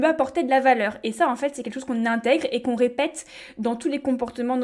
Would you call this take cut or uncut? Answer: uncut